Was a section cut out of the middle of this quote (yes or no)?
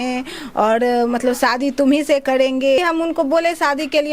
yes